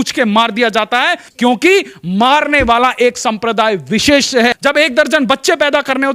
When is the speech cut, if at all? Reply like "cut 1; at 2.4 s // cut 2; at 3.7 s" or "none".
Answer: cut 1; at 1.2 s // cut 2; at 4.6 s